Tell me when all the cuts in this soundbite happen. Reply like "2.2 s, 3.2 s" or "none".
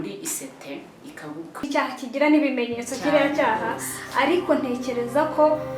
1.7 s